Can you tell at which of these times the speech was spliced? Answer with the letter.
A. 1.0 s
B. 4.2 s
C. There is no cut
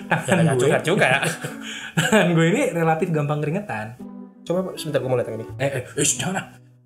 C